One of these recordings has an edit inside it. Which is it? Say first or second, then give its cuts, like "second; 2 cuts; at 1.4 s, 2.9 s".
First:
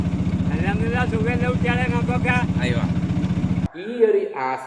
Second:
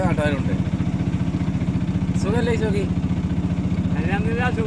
first; 1 cut; at 3.7 s